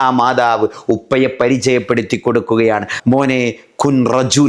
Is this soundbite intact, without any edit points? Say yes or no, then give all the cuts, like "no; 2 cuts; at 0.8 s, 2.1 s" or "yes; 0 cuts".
no; 1 cut; at 2.9 s